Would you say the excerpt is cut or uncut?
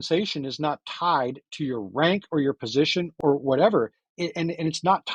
cut